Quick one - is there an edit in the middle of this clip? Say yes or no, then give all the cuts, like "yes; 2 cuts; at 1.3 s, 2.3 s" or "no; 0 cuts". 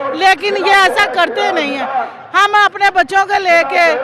no; 0 cuts